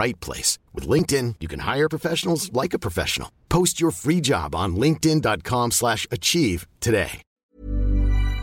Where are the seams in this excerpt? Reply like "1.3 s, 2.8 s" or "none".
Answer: 7.5 s